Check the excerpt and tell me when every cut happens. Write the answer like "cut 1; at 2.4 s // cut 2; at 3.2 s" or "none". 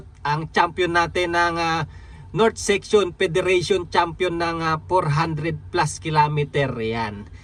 none